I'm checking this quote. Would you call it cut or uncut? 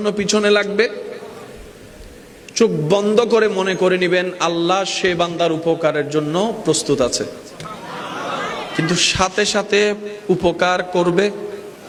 uncut